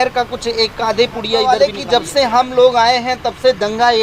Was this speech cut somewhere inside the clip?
yes; 1 cut; at 1.5 s

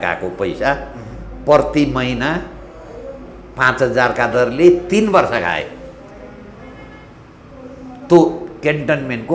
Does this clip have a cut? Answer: no; 0 cuts

